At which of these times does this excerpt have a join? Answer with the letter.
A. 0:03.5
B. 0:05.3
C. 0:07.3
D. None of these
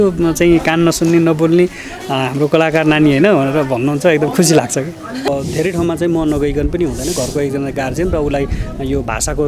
B